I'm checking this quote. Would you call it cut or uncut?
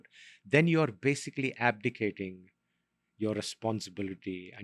uncut